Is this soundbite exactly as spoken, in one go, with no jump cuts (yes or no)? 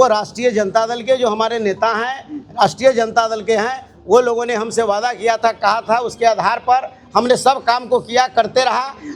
yes